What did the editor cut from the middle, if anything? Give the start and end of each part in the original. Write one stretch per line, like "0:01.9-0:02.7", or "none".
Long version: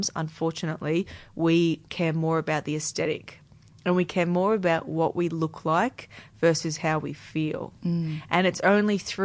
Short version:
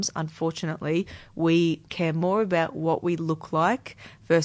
0:02.2-0:04.3

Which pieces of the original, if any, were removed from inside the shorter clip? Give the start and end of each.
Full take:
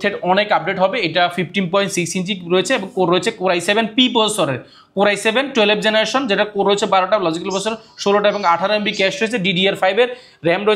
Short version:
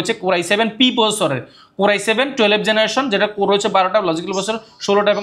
none

